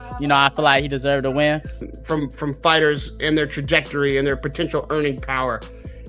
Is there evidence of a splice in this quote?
yes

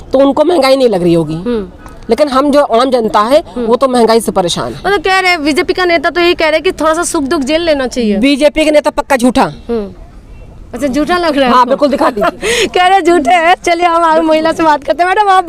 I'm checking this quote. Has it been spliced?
no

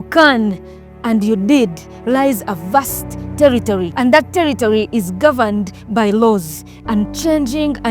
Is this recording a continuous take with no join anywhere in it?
no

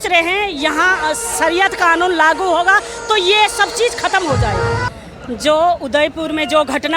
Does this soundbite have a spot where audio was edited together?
no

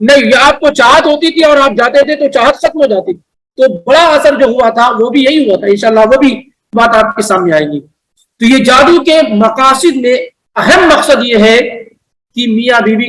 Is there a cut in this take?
no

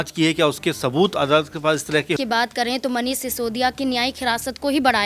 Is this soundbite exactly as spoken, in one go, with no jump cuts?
no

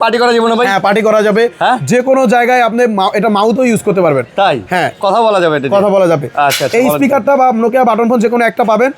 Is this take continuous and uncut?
yes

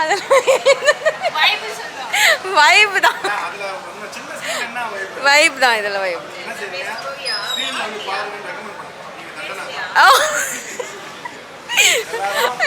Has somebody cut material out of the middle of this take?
no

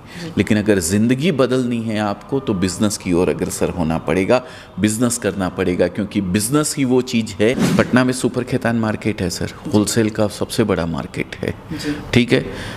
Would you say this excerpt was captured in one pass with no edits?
no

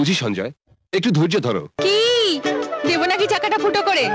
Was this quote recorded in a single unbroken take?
no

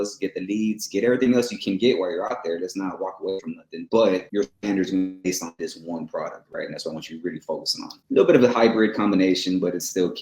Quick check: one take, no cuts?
no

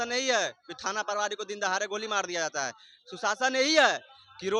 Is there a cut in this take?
no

